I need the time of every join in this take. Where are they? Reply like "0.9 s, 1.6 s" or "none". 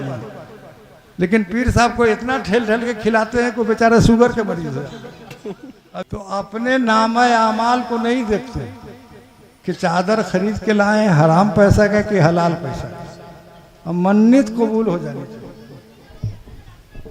6.0 s